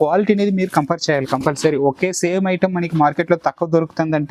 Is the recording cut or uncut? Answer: uncut